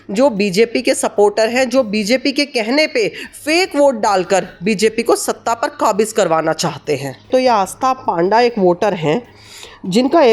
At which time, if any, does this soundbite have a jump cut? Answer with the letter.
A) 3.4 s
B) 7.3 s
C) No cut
B